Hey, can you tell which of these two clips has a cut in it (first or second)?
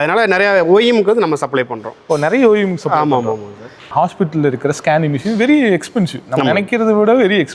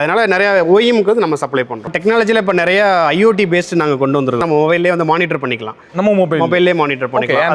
second